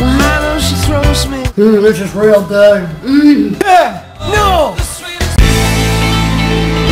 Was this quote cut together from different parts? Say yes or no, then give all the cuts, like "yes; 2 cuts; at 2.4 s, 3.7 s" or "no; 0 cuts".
no; 0 cuts